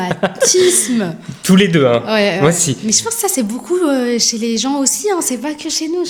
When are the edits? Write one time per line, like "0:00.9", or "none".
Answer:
none